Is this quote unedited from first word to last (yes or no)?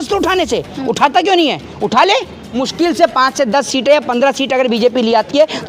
no